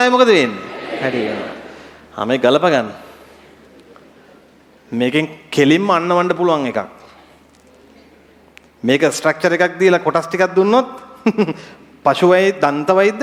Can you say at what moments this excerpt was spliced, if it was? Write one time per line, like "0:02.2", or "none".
none